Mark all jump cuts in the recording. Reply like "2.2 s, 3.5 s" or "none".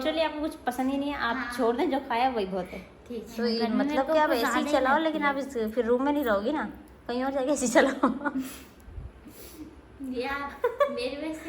3.3 s

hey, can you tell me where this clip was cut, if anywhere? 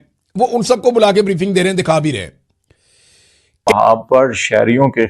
3.5 s

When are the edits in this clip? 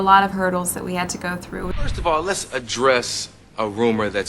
1.9 s

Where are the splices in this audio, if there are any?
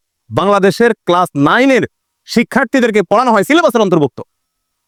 none

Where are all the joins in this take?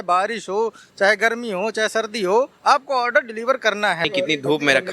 4.0 s

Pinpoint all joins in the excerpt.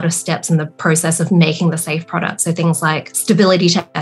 3.1 s

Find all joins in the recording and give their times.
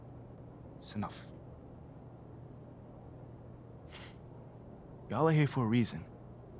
0.9 s

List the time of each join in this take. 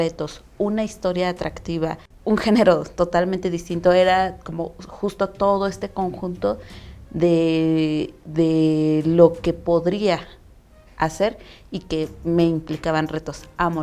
2.1 s

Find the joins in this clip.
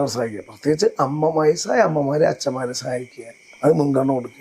none

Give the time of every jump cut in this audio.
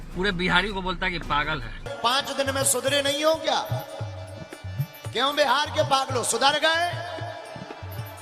1.8 s

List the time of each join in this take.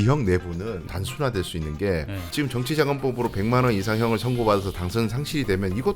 0.9 s, 2.2 s

